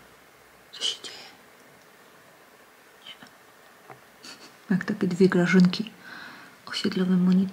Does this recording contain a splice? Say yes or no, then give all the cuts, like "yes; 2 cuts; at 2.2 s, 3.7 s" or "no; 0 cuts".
no; 0 cuts